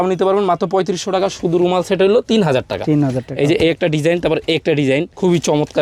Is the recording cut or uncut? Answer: uncut